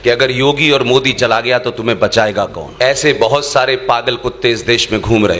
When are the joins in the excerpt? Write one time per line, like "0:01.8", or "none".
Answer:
0:02.6

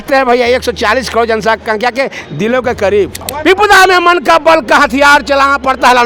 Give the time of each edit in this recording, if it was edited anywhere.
0:03.2

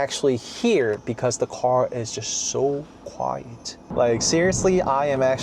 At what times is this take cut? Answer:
0:03.9

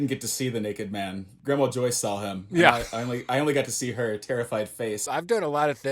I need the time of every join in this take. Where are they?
0:01.3
0:05.0

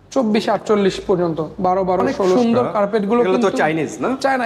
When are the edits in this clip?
0:02.4

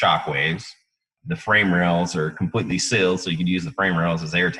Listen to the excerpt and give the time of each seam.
0:01.1

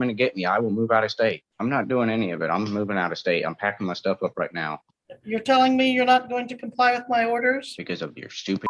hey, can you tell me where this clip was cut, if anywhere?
0:01.5
0:07.7

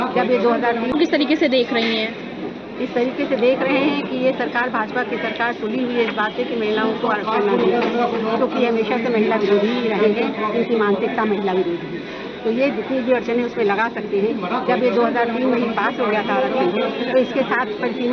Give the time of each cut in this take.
0:00.9

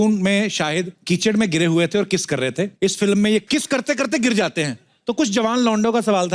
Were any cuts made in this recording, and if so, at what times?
0:00.9
0:02.7
0:03.4

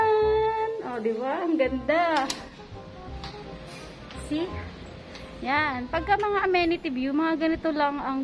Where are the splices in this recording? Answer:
0:02.6

